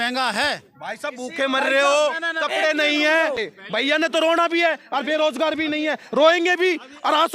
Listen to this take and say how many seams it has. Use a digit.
1